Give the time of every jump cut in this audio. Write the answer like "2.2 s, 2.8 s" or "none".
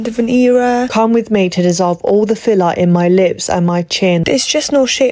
0.9 s, 4.2 s